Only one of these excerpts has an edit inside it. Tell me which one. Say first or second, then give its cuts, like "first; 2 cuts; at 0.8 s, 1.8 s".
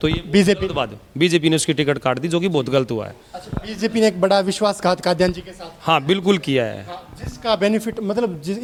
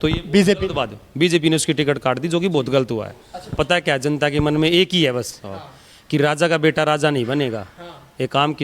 second; 1 cut; at 3.5 s